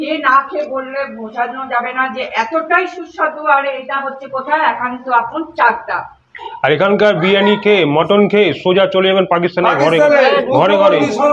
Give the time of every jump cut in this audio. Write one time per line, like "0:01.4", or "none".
0:06.5